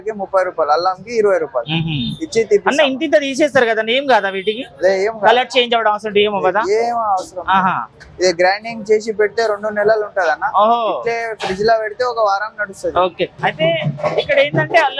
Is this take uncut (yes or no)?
no